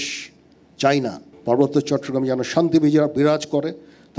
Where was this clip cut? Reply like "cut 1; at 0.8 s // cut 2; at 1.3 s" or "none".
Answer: cut 1; at 1.3 s